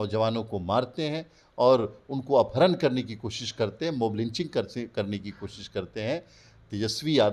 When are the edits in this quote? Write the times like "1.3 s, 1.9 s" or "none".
none

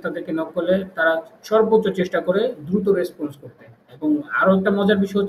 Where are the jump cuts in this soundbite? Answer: none

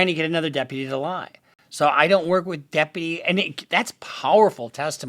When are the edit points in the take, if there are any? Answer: none

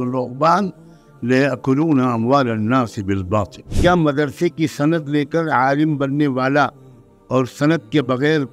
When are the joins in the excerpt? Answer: 3.7 s

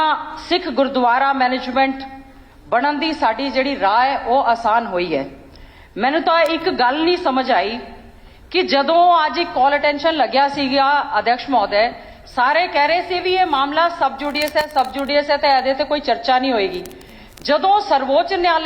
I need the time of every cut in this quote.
none

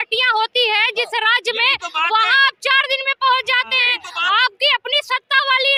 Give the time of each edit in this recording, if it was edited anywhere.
none

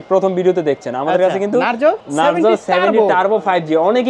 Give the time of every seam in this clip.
2.0 s

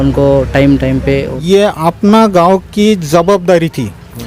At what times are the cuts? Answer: 1.3 s

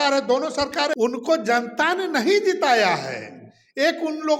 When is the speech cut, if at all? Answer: 0.9 s

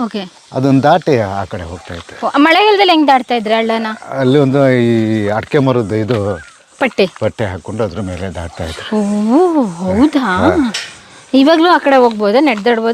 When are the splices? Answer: none

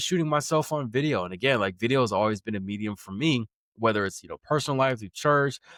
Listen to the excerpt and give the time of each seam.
none

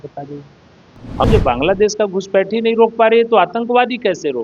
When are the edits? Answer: 1.3 s

